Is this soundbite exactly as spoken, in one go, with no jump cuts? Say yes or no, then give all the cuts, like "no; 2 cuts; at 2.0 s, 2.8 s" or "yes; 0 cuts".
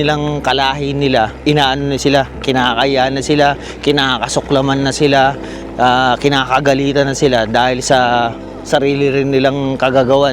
no; 1 cut; at 1.3 s